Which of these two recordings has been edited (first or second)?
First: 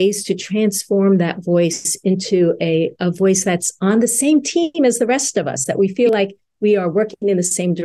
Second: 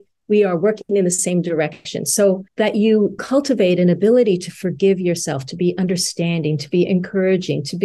second